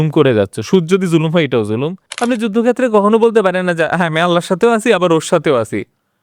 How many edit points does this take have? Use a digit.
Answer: 1